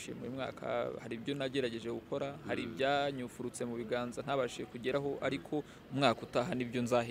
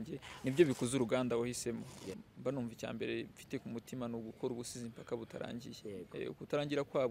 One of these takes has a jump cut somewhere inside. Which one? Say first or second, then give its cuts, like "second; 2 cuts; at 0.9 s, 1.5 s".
second; 1 cut; at 2.1 s